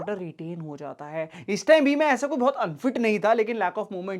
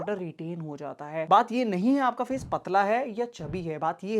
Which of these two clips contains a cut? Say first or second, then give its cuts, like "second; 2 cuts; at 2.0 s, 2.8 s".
second; 1 cut; at 1.3 s